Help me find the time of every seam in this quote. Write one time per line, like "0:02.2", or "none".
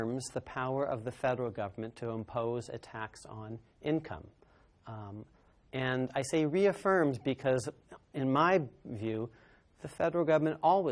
none